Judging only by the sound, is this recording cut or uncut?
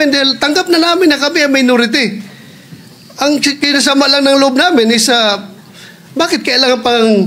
uncut